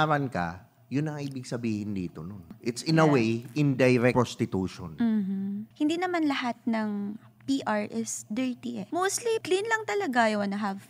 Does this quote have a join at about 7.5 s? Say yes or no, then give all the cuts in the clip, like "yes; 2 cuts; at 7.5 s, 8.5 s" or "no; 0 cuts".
no; 4 cuts; at 2.5 s, 4.1 s, 5.7 s, 9.3 s